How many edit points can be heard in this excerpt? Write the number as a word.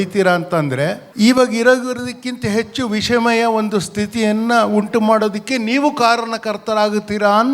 one